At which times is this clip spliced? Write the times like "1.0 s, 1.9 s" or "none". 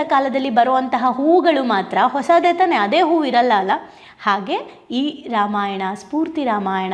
none

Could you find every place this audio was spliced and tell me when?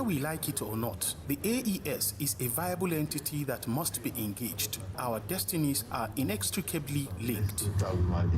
1.1 s, 5.0 s

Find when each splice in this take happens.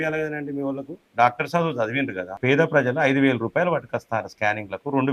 2.4 s

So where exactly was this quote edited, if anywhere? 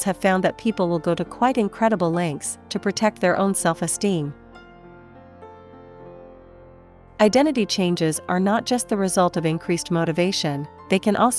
4.4 s, 6.8 s

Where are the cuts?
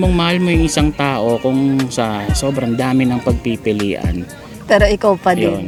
none

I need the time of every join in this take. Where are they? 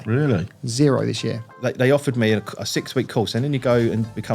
1.5 s

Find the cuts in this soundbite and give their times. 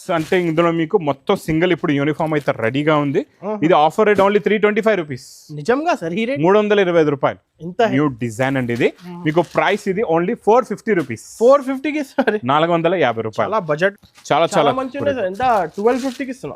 7.9 s, 13.9 s

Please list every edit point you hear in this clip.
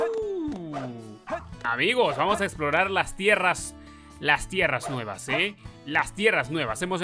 none

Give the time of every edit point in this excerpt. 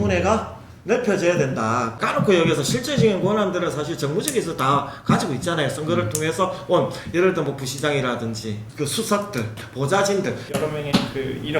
9.5 s, 10.4 s

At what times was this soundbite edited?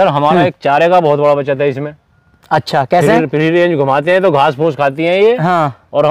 none

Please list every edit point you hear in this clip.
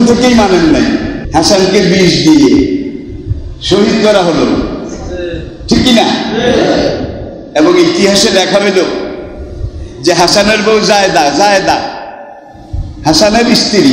1.2 s

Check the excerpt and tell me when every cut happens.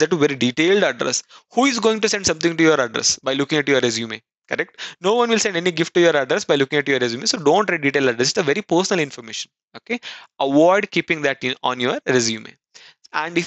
none

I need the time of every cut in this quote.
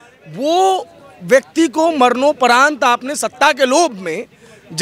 none

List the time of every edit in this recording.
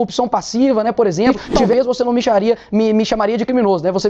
1.7 s

